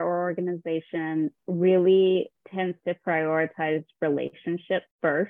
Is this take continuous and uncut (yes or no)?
yes